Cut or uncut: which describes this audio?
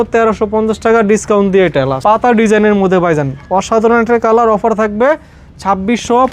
cut